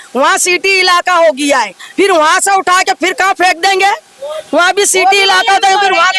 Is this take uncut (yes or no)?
yes